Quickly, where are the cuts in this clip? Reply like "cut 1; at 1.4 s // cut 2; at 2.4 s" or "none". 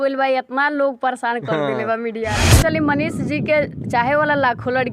cut 1; at 2.5 s